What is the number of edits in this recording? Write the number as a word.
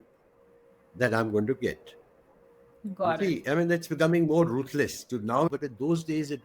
one